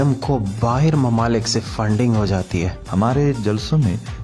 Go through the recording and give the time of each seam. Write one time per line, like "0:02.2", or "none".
0:02.8